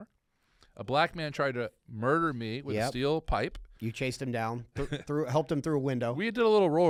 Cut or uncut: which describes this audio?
uncut